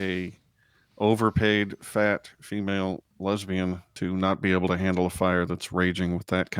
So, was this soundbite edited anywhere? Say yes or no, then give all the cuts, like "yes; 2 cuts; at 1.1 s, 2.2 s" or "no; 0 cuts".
yes; 1 cut; at 3.9 s